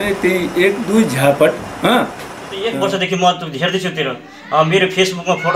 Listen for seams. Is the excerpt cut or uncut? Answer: cut